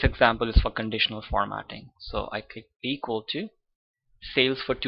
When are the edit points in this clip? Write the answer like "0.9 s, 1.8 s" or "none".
none